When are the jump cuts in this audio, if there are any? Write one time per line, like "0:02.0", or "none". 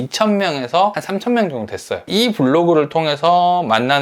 0:01.0
0:02.1